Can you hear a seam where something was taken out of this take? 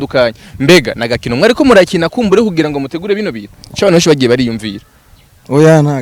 no; 0 cuts

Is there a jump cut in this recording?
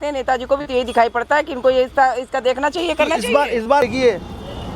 yes; 1 cut; at 3.8 s

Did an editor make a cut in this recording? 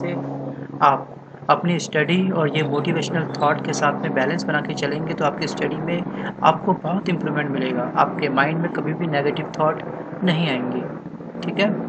no; 0 cuts

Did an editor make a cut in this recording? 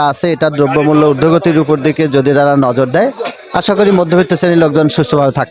no; 0 cuts

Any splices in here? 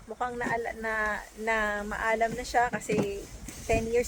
no; 0 cuts

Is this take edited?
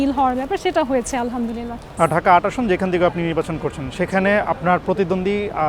no; 0 cuts

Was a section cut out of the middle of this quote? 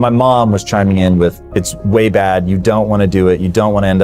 yes; 1 cut; at 1.4 s

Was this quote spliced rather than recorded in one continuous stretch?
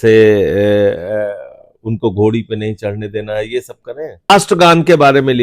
yes; 1 cut; at 4.3 s

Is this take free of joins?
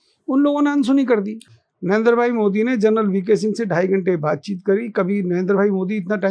no; 1 cut; at 1.4 s

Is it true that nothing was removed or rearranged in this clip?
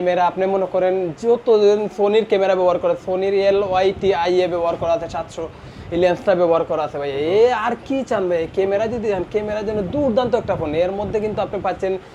yes; 0 cuts

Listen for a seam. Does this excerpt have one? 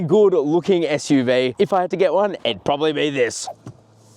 yes; 2 cuts; at 1.5 s, 3.4 s

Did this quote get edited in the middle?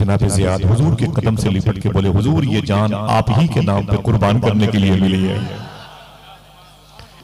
no; 0 cuts

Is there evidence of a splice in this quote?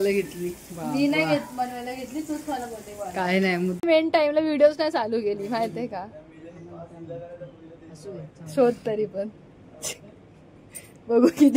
yes; 1 cut; at 3.8 s

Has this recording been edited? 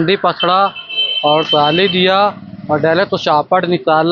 no; 0 cuts

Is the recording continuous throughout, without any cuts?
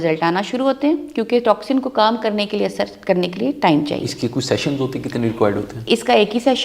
yes; 0 cuts

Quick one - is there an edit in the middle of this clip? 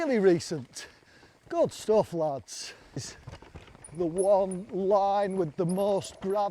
yes; 1 cut; at 3.2 s

